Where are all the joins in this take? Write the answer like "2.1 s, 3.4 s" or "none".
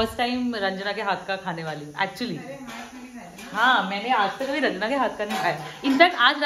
none

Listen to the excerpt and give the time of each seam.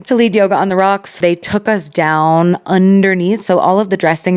1.2 s

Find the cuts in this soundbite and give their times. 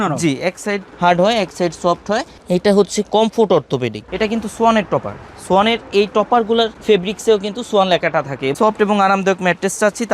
4.0 s, 8.5 s

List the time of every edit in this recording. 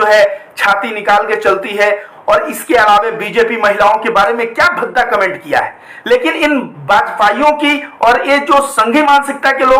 none

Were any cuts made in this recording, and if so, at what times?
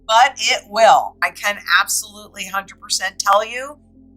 1.3 s

